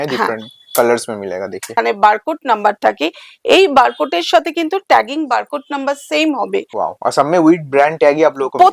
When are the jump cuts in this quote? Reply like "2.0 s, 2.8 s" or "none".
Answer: 1.7 s, 6.7 s